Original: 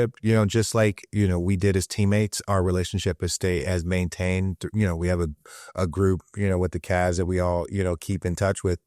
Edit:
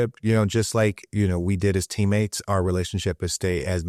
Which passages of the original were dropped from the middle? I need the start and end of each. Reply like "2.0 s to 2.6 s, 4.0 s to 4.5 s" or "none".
none